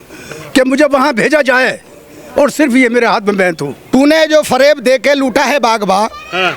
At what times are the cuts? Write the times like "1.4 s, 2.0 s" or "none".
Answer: 3.7 s